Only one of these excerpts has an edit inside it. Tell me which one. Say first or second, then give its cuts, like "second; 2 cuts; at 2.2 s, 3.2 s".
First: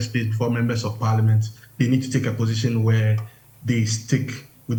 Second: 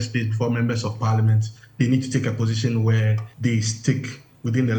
second; 1 cut; at 3.2 s